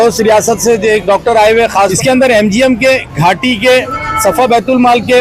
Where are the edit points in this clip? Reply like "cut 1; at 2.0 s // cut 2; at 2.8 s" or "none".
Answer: cut 1; at 1.9 s